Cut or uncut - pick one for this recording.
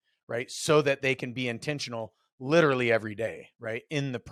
uncut